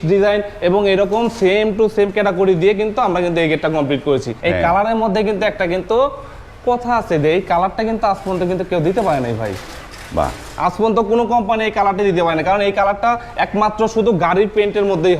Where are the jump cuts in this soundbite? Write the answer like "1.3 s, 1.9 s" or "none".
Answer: 4.3 s